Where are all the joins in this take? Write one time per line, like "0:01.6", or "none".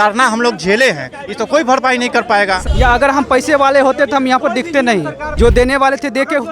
0:02.7
0:05.2